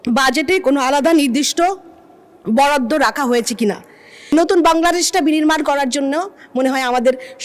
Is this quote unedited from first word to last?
no; 1 cut; at 4.3 s

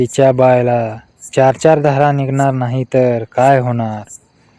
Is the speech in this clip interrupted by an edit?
no; 0 cuts

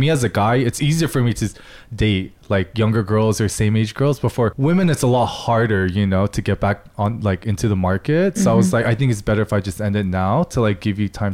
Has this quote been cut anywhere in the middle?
yes; 1 cut; at 4.5 s

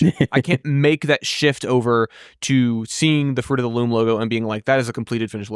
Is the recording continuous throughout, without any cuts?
yes; 0 cuts

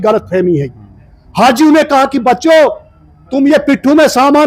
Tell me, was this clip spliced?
no; 0 cuts

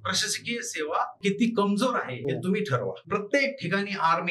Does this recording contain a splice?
yes; 3 cuts; at 1.2 s, 2.1 s, 3.0 s

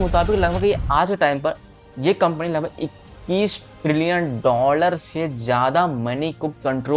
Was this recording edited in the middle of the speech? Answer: no; 0 cuts

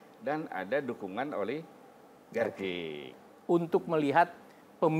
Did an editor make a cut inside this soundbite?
yes; 1 cut; at 3.2 s

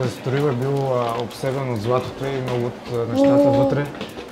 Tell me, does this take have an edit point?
no; 0 cuts

